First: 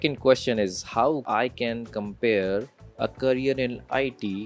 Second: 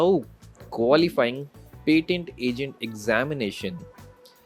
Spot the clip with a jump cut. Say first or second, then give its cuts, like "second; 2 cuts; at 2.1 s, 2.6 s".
first; 2 cuts; at 1.2 s, 2.8 s